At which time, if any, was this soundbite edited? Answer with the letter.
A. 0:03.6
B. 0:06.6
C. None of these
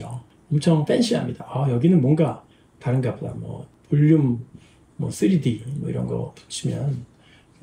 C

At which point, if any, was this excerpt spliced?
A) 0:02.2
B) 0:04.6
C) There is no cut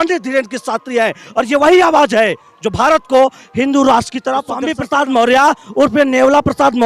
B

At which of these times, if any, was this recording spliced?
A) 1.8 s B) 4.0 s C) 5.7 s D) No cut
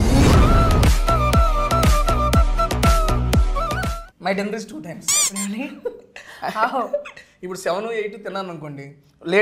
B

